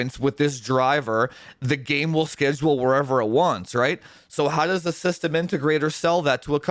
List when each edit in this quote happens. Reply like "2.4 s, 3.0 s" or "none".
none